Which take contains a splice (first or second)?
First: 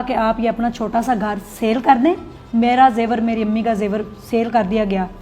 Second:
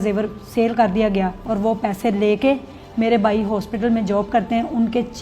first